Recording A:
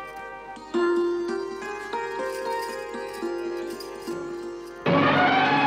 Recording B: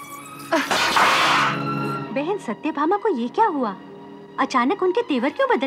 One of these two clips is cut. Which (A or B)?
B